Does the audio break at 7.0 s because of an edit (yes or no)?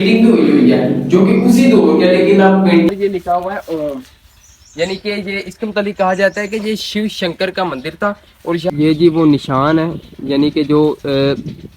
no